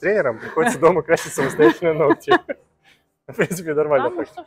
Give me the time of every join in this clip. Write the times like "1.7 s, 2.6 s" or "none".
none